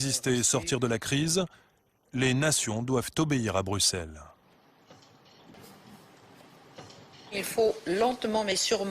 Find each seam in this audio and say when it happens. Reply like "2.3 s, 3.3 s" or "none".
5.5 s